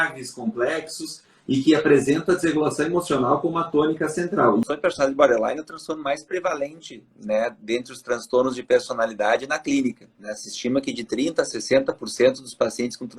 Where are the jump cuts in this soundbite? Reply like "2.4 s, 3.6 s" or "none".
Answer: 4.6 s